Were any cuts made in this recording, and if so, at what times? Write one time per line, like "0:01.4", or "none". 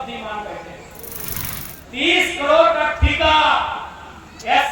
0:01.4

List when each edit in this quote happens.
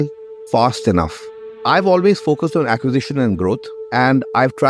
0:01.5
0:03.8

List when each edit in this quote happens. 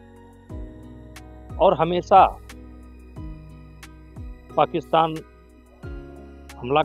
none

